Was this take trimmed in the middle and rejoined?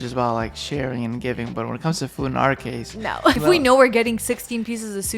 yes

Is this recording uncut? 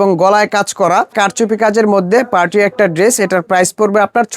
no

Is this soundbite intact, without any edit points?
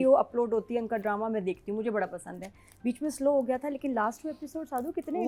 yes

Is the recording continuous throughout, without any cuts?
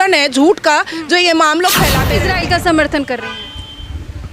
no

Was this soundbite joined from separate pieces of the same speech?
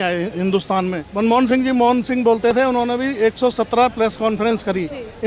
yes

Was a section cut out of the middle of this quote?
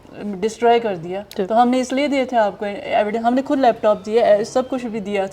no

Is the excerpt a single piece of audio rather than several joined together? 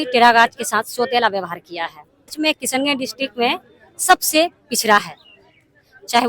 no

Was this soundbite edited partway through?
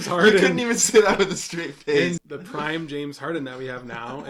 yes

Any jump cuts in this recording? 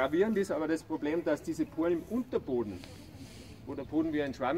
no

